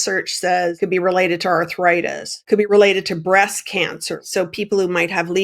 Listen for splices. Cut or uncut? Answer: cut